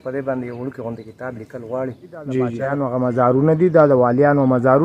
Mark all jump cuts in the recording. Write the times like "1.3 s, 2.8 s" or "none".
2.7 s